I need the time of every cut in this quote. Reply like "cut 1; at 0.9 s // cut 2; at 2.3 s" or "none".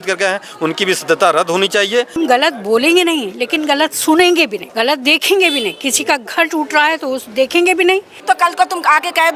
cut 1; at 2.2 s // cut 2; at 4.6 s // cut 3; at 8.1 s